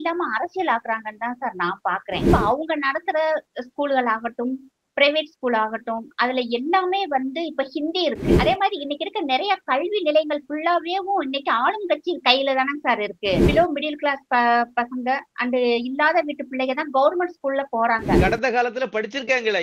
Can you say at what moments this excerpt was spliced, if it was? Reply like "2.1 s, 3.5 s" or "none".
2.3 s, 8.4 s, 13.5 s, 18.2 s